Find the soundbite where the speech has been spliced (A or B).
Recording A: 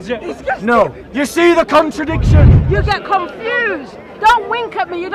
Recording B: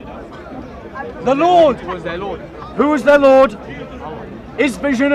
A